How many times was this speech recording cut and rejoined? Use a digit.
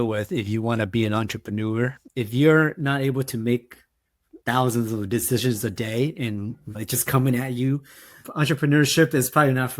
1